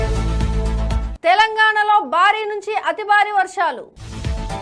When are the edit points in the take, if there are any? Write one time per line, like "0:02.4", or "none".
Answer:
none